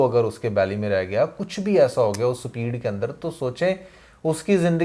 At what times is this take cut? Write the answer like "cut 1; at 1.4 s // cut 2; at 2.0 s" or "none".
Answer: none